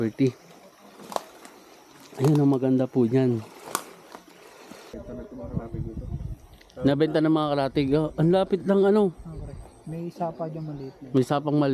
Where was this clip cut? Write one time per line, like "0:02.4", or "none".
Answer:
0:05.1